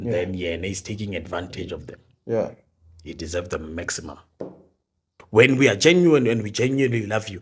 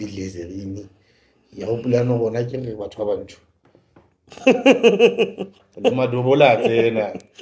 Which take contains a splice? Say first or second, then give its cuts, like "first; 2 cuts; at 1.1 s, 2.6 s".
first; 1 cut; at 5.2 s